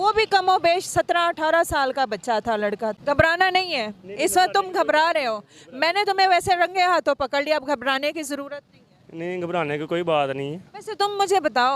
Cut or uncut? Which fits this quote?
cut